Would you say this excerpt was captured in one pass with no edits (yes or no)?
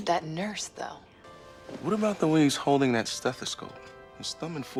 yes